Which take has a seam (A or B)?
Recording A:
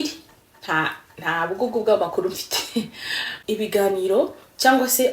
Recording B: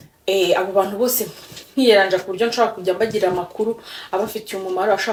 A